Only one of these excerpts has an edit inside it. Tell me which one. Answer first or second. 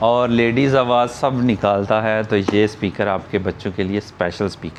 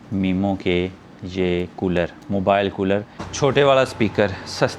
second